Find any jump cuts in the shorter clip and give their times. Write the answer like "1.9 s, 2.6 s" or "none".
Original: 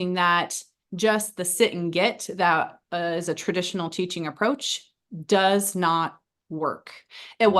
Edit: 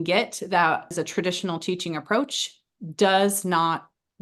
0.9 s